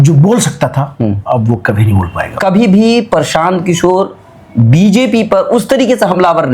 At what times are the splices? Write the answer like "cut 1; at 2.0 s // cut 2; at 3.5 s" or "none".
cut 1; at 2.3 s

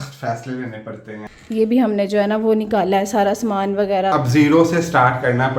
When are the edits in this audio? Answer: cut 1; at 1.3 s // cut 2; at 4.1 s

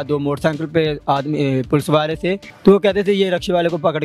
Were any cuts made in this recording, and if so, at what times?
cut 1; at 2.5 s

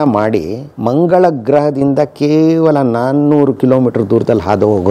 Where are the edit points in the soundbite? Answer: none

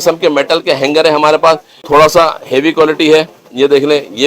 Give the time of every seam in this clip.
cut 1; at 1.7 s

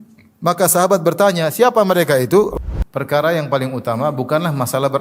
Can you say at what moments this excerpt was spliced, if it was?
cut 1; at 2.6 s

